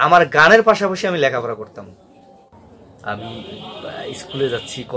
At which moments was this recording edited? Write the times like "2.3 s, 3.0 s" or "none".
2.5 s